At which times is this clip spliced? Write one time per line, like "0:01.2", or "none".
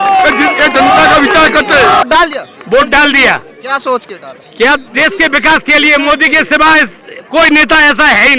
0:02.0